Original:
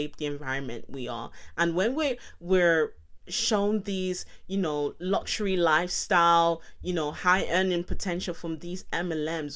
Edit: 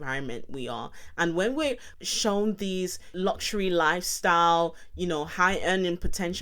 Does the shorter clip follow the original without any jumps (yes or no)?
no